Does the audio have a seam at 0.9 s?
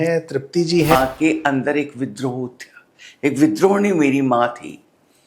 yes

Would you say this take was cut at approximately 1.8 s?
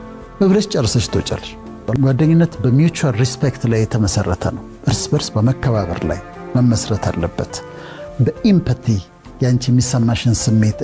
yes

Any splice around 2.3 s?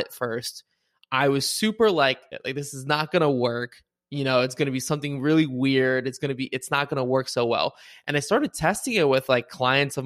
yes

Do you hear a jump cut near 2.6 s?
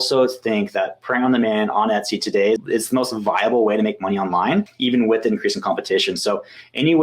yes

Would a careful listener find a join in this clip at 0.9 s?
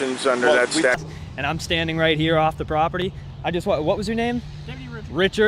yes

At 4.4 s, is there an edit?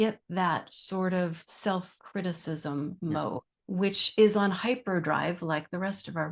no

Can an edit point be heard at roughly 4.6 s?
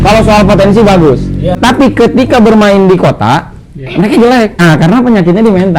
yes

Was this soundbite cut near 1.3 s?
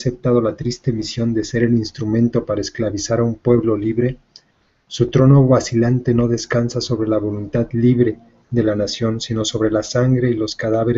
yes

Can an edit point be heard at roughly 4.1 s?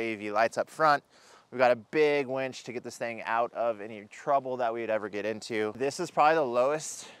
no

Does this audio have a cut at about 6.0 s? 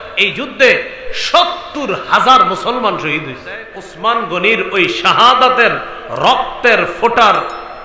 no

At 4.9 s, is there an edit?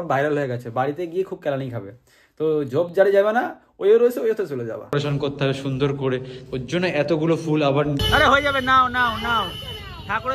yes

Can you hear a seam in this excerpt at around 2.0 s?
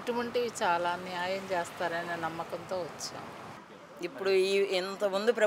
no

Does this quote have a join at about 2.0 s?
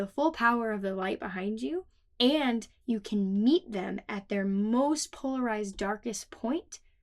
yes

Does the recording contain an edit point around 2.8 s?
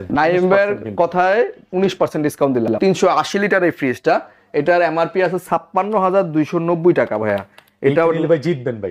yes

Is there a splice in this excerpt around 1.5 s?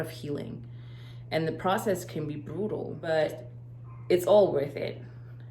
no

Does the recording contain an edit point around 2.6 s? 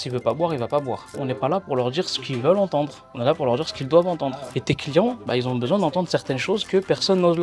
no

